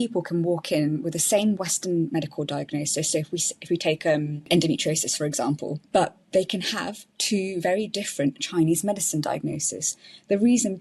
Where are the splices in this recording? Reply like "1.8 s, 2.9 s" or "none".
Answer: 4.5 s, 5.8 s